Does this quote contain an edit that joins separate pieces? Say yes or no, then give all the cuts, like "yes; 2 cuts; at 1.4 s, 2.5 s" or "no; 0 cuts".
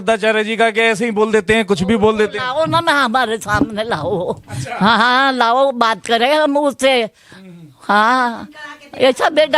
no; 0 cuts